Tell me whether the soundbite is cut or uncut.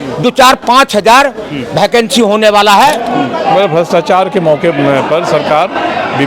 cut